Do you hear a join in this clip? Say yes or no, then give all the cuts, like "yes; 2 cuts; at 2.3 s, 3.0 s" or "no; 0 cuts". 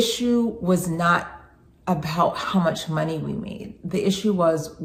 no; 0 cuts